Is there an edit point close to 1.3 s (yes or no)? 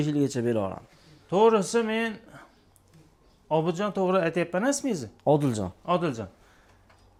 no